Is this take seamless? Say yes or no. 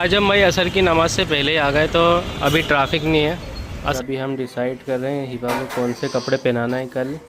no